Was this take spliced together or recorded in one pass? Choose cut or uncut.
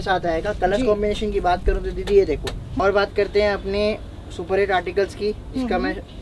cut